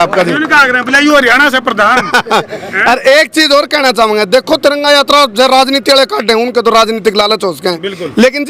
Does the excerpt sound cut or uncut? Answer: uncut